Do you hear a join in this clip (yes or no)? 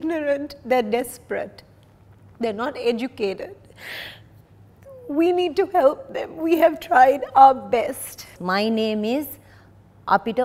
yes